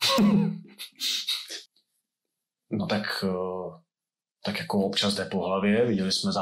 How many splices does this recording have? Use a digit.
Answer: 1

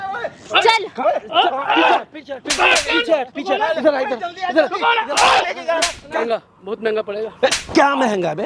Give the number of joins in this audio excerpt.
1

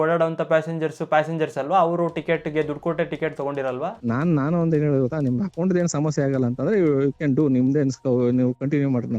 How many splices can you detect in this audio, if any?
1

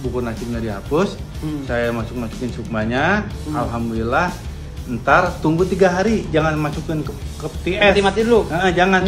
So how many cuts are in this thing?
0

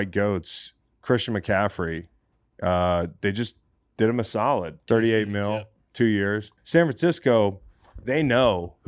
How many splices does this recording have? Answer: 2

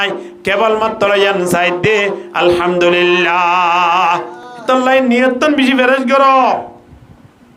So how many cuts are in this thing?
0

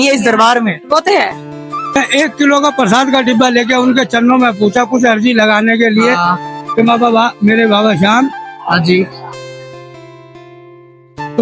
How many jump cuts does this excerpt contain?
1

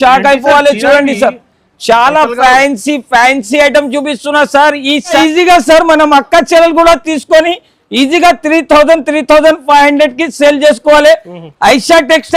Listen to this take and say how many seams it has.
1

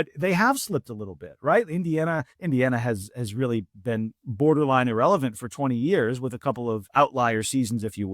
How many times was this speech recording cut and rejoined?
2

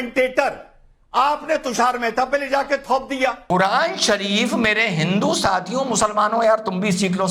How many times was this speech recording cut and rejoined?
1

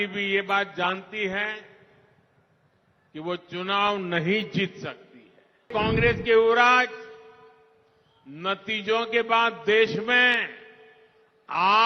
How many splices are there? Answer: 1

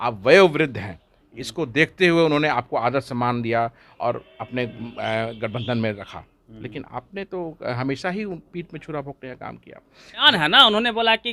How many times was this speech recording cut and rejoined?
1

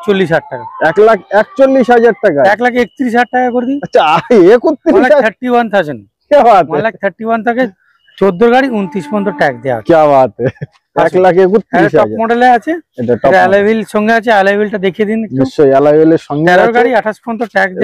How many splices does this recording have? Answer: 0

